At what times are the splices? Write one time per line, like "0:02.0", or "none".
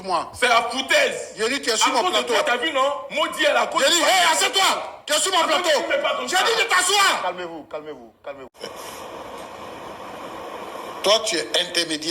0:08.5

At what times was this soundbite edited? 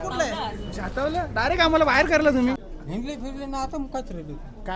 0:02.6

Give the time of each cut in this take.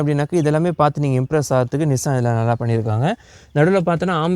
none

